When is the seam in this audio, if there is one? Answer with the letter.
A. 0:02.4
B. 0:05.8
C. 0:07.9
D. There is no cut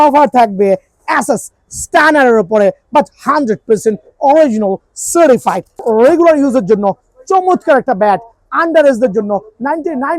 B